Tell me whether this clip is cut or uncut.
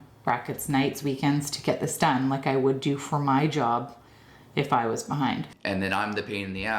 cut